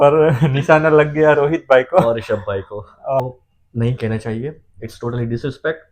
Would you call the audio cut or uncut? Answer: cut